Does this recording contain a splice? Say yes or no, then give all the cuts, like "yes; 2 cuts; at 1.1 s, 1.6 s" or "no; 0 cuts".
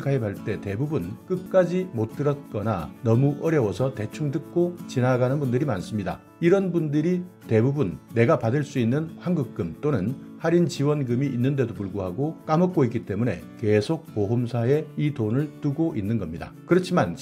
yes; 1 cut; at 1.1 s